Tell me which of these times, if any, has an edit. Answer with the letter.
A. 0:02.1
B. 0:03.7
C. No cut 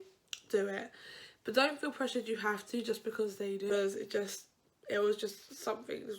B